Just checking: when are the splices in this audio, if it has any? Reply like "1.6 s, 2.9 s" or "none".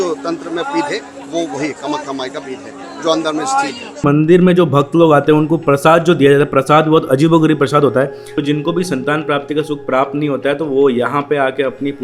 4.0 s, 8.3 s